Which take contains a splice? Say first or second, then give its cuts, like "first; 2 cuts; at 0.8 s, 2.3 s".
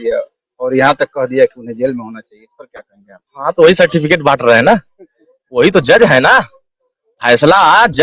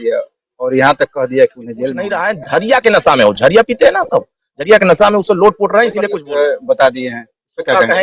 second; 2 cuts; at 2.1 s, 6.1 s